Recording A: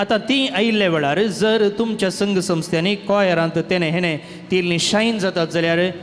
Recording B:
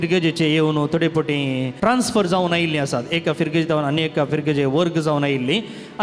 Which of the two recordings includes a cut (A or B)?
B